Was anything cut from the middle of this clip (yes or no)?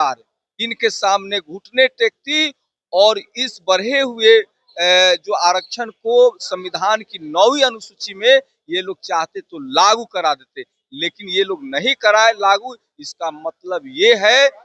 no